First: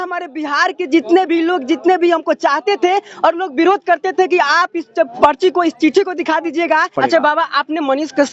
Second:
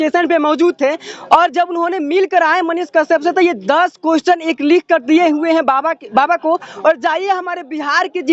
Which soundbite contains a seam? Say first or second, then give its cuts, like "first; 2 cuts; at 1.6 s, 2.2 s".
first; 1 cut; at 6.9 s